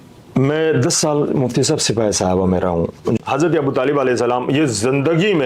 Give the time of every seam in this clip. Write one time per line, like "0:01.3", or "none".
0:03.2